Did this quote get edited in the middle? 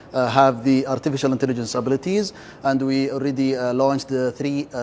no; 0 cuts

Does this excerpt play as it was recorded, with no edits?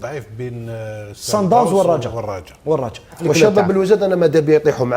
no; 1 cut; at 3.2 s

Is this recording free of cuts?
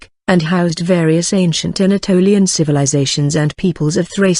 yes; 0 cuts

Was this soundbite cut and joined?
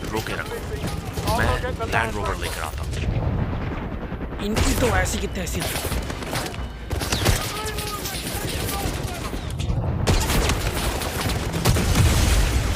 no; 0 cuts

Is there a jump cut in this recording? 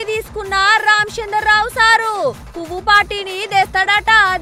no; 0 cuts

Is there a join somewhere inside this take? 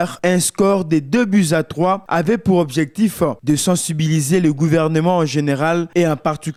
no; 0 cuts

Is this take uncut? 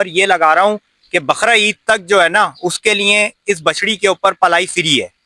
yes; 0 cuts

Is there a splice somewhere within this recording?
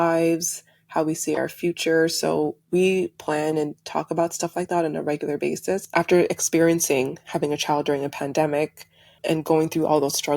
yes; 1 cut; at 5.8 s

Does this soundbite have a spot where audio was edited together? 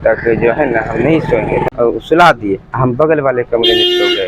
yes; 1 cut; at 1.7 s

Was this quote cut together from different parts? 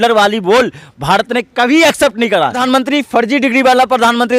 yes; 1 cut; at 2.6 s

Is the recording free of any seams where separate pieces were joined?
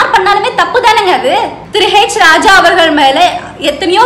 no; 1 cut; at 1.6 s

